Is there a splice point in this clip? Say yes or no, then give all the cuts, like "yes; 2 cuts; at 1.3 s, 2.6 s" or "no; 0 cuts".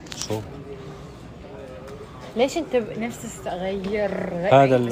no; 0 cuts